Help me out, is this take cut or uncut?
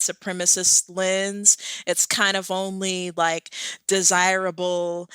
uncut